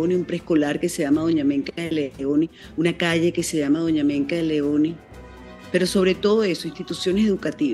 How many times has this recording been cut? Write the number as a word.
one